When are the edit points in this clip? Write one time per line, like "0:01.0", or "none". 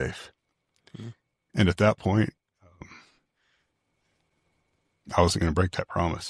none